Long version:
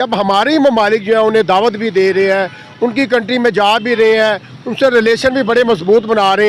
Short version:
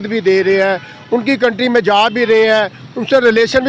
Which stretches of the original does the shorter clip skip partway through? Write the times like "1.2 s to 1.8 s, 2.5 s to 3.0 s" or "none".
none